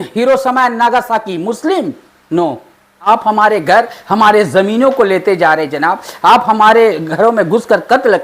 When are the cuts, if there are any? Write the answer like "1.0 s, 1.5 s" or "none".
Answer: 3.1 s